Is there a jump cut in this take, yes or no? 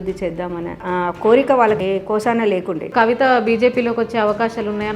yes